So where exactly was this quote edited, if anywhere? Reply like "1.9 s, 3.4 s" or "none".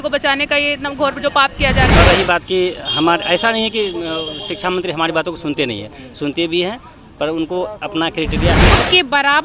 1.9 s, 8.7 s